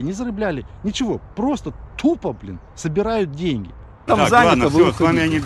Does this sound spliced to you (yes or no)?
yes